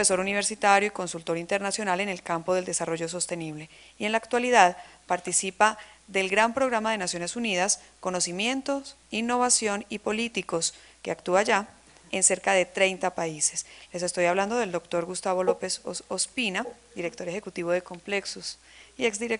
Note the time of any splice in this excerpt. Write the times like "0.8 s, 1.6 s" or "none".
14.4 s